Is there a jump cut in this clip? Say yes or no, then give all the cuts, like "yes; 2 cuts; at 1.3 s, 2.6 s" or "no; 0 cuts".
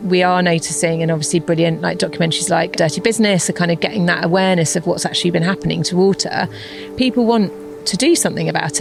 no; 0 cuts